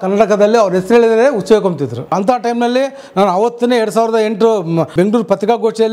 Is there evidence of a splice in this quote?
yes; 2 cuts; at 2.1 s, 4.9 s

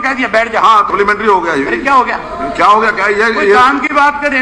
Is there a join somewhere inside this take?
yes; 1 cut; at 0.9 s

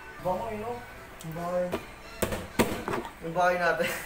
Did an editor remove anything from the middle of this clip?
no; 0 cuts

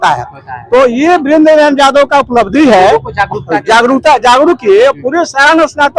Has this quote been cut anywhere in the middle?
no; 0 cuts

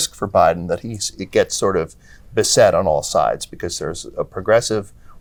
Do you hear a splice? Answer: no; 0 cuts

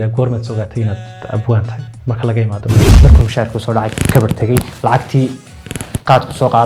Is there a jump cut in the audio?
yes; 1 cut; at 2.9 s

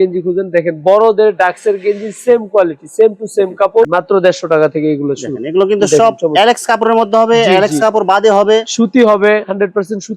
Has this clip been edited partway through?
yes; 1 cut; at 3.9 s

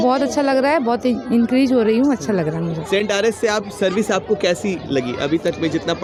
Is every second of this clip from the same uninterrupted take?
yes; 0 cuts

